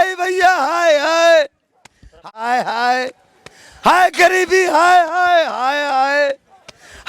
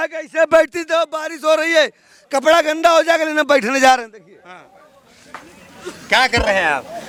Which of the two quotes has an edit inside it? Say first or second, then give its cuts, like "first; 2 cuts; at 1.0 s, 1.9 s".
first; 1 cut; at 2.3 s